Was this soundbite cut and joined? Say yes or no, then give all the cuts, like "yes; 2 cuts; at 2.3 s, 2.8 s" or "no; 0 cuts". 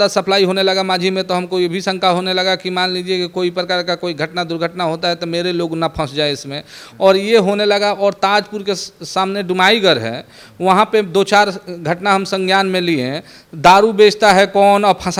no; 0 cuts